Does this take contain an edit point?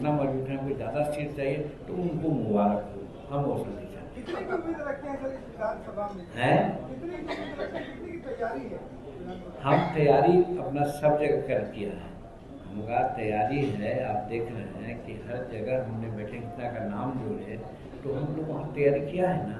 no; 0 cuts

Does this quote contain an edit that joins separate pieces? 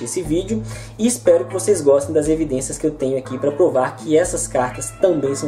yes; 1 cut; at 2.7 s

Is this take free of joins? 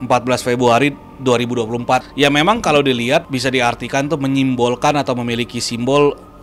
no; 2 cuts; at 2.1 s, 3.3 s

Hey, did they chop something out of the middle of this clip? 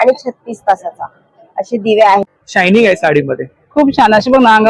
yes; 1 cut; at 2.2 s

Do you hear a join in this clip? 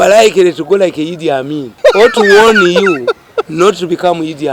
yes; 1 cut; at 1.6 s

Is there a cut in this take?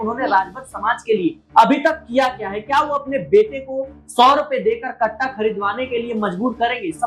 no; 0 cuts

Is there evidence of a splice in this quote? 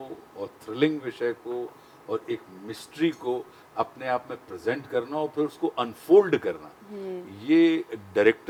no; 0 cuts

